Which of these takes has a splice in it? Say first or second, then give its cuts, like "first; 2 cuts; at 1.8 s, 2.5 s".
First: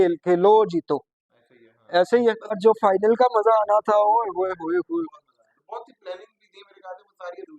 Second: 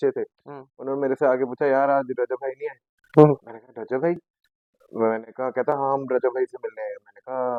first; 1 cut; at 2.6 s